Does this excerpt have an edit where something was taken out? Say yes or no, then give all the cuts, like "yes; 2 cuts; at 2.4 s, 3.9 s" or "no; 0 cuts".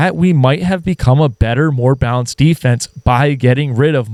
no; 0 cuts